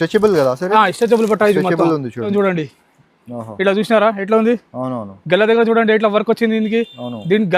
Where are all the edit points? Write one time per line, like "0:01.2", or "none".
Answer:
0:02.3